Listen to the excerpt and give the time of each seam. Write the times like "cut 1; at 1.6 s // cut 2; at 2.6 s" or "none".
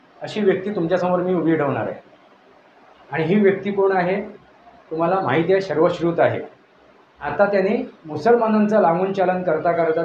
cut 1; at 7.3 s